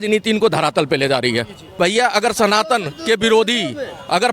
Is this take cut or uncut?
cut